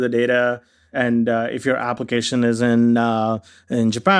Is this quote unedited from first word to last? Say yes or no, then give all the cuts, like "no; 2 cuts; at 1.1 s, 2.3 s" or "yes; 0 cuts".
yes; 0 cuts